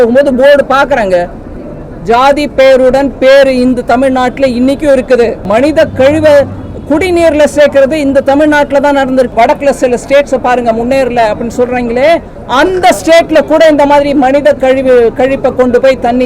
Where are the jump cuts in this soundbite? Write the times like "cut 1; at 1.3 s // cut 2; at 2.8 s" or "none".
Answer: cut 1; at 5.4 s // cut 2; at 9.3 s

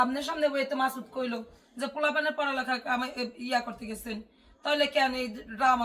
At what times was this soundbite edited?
none

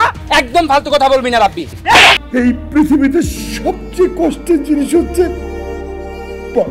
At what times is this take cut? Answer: cut 1; at 2.2 s

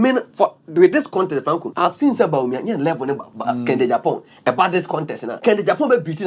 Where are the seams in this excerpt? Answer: cut 1; at 1.7 s // cut 2; at 5.2 s

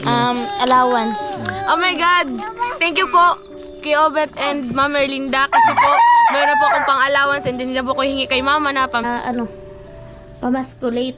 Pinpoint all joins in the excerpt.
cut 1; at 9.0 s

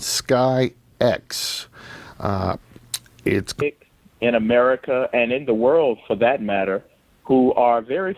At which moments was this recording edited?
none

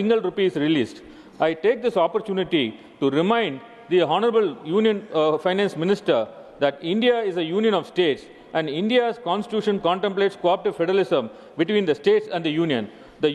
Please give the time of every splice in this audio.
none

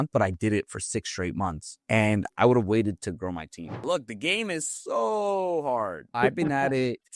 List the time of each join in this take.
cut 1; at 3.7 s

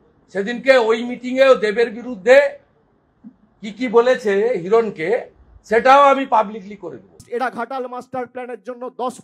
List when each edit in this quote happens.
cut 1; at 7.2 s

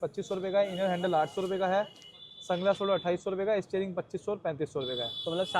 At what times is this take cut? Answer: none

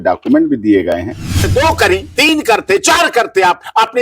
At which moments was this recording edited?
cut 1; at 1.4 s

